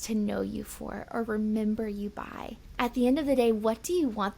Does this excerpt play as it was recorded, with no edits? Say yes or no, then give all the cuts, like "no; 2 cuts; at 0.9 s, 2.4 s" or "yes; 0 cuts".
no; 1 cut; at 2.6 s